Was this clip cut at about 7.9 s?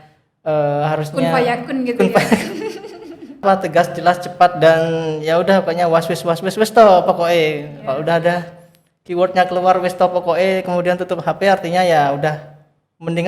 no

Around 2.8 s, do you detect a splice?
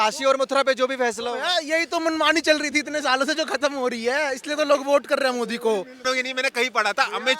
no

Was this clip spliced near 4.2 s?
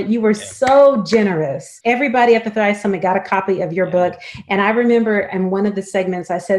no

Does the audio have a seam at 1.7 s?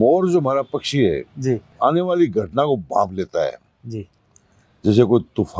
yes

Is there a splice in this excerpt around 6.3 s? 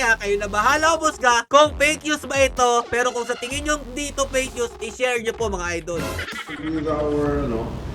yes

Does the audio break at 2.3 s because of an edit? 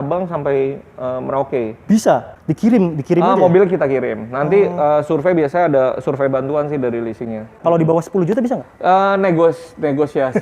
yes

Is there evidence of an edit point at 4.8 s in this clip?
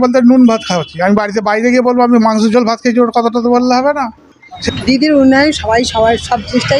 yes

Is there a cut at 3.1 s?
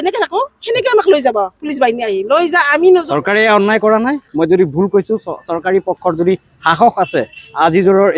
yes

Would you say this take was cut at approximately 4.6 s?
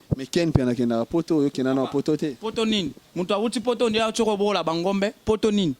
no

